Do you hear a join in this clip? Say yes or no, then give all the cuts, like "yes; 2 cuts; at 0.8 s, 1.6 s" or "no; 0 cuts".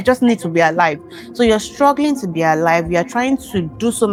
no; 0 cuts